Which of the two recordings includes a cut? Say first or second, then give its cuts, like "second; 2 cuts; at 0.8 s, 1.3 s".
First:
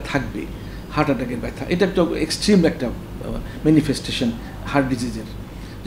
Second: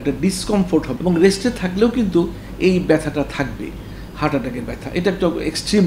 second; 1 cut; at 0.9 s